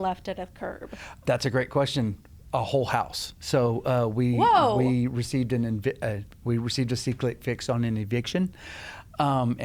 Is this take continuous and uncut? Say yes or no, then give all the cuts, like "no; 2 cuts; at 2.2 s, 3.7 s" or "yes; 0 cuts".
no; 1 cut; at 1.2 s